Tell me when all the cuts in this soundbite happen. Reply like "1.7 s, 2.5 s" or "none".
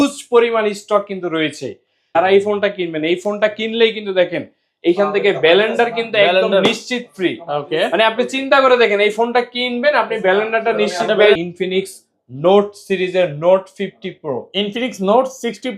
2.0 s, 11.4 s